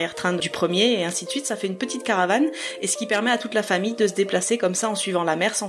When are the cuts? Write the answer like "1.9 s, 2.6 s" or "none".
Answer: none